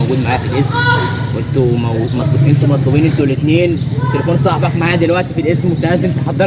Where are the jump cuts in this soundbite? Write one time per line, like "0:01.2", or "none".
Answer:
none

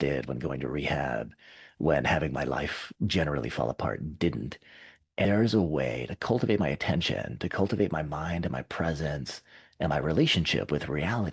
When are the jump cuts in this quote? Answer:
0:05.2

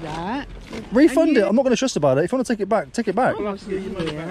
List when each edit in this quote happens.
0:03.4

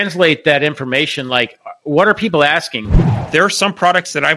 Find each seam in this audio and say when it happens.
0:03.0

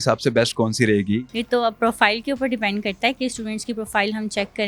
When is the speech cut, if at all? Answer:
0:01.3

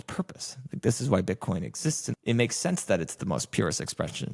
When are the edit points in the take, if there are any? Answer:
0:02.1

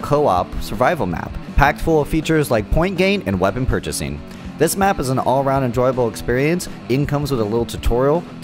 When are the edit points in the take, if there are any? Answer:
0:03.7

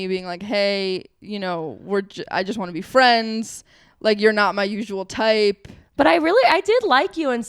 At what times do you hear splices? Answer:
none

